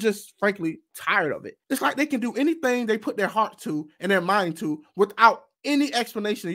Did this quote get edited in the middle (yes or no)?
yes